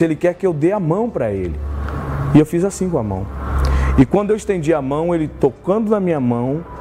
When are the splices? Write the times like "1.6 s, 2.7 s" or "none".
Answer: none